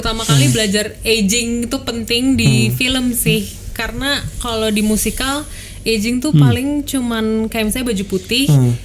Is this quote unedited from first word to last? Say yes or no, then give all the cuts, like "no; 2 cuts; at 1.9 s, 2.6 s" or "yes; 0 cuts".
yes; 0 cuts